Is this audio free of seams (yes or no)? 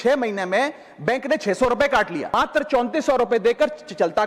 no